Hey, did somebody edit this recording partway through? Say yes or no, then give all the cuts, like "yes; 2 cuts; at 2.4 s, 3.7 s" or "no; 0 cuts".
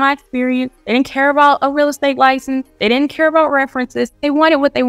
no; 0 cuts